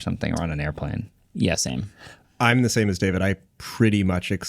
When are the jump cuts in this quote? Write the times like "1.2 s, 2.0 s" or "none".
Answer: 2.2 s